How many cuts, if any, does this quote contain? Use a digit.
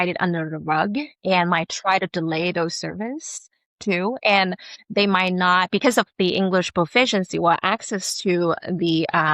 0